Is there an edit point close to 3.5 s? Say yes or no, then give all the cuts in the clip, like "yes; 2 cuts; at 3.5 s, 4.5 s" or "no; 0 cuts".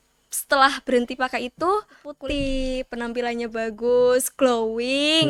no; 1 cut; at 2.0 s